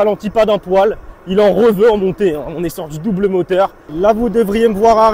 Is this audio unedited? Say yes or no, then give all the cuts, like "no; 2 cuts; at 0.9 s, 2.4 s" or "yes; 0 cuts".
no; 1 cut; at 3.8 s